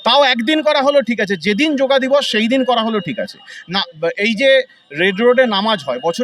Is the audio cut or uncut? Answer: uncut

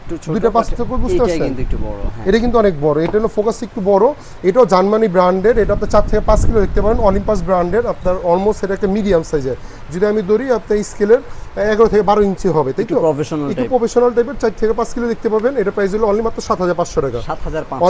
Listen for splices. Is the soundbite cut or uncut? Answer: uncut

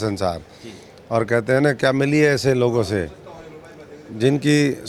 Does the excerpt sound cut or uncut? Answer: uncut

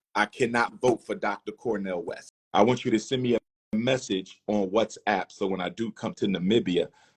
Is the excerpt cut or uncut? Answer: cut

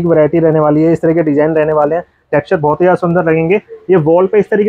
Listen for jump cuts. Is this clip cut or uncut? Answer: uncut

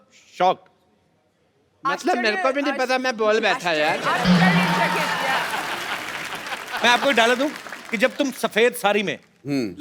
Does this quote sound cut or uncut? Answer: cut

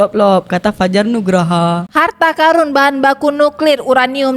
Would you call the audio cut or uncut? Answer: cut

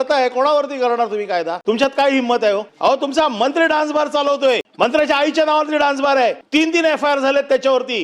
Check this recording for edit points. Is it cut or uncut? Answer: cut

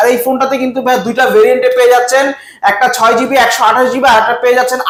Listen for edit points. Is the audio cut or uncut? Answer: uncut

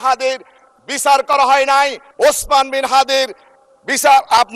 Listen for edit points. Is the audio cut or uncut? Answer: cut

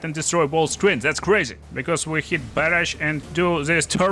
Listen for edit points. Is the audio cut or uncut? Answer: cut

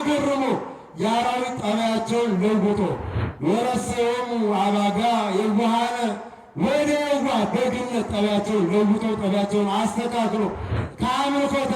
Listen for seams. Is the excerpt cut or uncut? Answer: cut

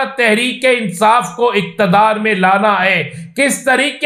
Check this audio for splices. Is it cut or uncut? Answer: uncut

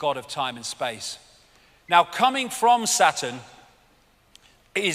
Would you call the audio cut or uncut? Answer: cut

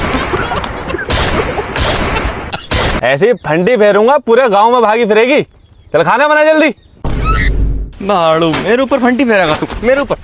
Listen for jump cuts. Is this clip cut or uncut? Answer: cut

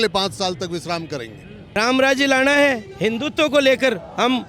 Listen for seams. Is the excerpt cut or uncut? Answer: cut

